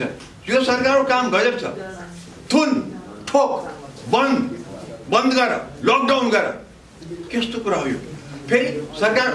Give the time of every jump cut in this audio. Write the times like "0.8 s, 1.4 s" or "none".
none